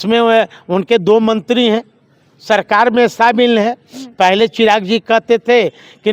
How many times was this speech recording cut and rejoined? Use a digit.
0